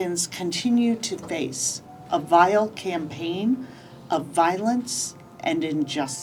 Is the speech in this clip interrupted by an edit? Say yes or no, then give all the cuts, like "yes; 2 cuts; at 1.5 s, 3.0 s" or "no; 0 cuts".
no; 0 cuts